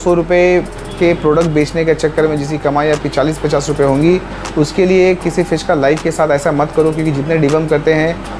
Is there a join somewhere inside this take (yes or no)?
no